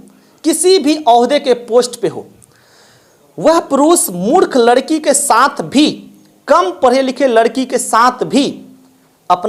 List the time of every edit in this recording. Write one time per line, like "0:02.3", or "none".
none